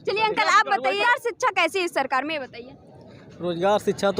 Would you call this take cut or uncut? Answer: cut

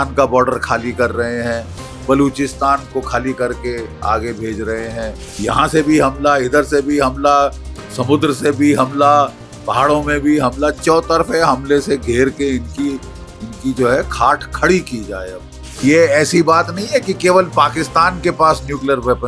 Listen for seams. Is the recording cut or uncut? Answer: cut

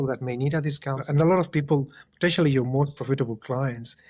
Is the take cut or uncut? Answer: cut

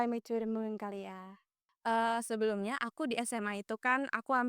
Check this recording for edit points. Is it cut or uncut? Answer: cut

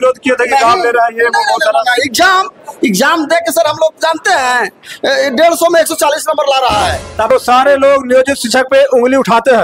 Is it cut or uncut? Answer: cut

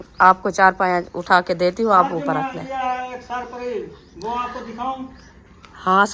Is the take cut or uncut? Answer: uncut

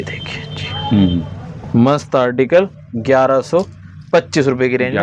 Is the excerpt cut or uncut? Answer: uncut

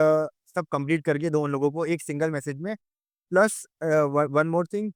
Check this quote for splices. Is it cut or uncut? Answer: uncut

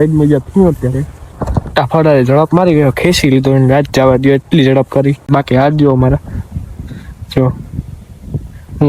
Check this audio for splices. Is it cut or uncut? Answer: cut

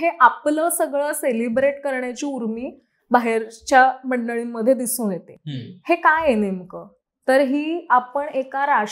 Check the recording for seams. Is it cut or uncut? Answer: uncut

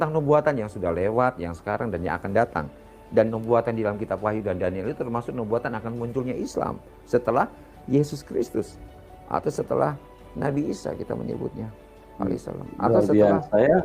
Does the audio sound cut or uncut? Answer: uncut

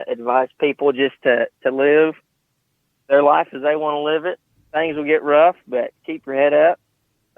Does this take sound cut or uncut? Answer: cut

